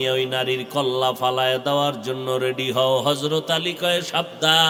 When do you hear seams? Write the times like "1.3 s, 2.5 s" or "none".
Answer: none